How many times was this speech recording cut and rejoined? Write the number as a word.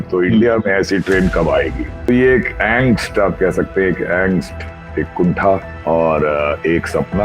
two